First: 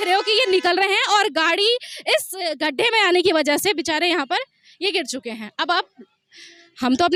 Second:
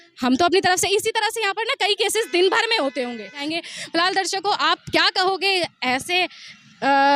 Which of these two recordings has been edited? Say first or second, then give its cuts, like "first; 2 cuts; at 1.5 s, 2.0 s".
second; 1 cut; at 3.4 s